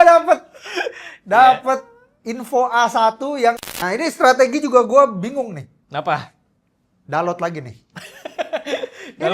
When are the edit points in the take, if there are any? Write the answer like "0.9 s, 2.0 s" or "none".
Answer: 3.6 s